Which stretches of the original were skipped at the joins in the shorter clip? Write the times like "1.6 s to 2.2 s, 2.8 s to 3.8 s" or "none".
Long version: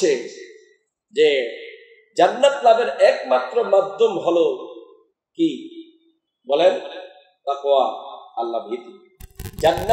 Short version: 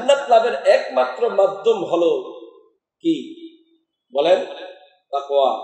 none